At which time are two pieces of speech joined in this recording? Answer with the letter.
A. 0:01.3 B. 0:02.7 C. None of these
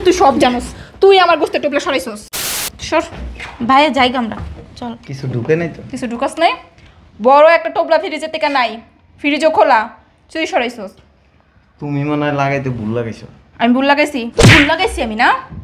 B